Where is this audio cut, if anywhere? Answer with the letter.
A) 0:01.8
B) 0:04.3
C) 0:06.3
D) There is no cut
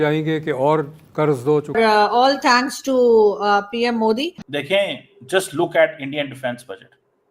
A